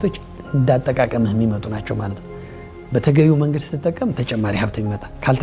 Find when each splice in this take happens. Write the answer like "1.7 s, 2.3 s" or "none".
none